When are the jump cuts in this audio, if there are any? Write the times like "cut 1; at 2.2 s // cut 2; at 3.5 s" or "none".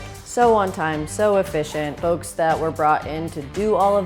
cut 1; at 2.0 s